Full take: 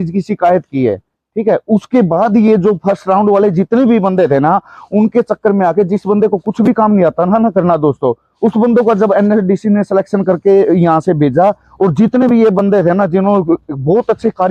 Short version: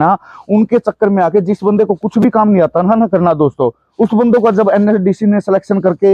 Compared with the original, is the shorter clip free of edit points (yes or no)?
yes